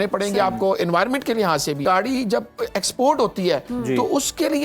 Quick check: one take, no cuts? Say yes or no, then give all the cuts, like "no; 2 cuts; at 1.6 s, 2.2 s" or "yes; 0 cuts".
no; 1 cut; at 1.8 s